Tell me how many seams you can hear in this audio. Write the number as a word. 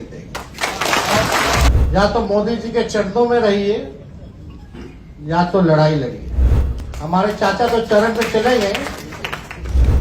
one